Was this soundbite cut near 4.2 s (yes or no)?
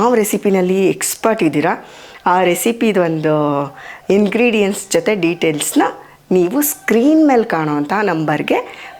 no